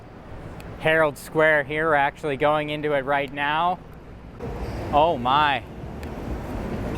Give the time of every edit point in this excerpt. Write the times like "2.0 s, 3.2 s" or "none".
4.2 s